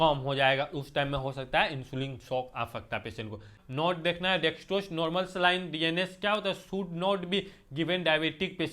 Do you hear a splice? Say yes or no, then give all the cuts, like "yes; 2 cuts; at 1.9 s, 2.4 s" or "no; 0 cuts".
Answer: yes; 1 cut; at 3.6 s